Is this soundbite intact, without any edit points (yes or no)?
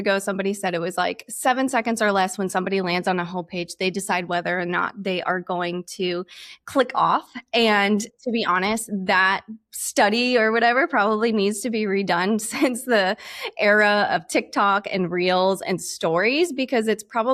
yes